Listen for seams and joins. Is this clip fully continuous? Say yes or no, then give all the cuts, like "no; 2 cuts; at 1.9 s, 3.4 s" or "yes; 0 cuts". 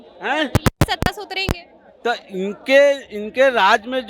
yes; 0 cuts